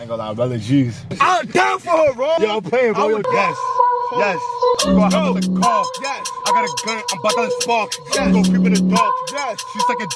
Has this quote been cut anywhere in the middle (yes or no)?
yes